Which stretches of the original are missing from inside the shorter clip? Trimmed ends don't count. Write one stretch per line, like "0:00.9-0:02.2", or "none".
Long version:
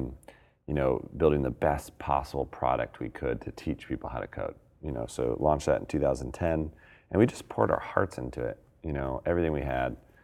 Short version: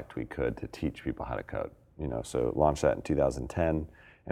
none